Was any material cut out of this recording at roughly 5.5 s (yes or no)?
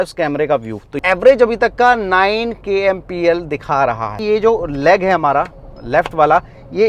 no